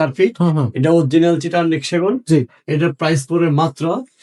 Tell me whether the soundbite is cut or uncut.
uncut